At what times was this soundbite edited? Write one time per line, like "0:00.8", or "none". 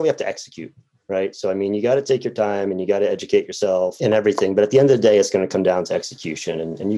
0:03.9